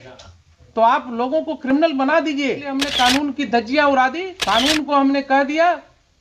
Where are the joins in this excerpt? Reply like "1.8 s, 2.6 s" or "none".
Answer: 2.8 s, 4.3 s